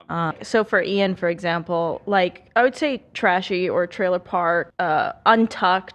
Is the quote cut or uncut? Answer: cut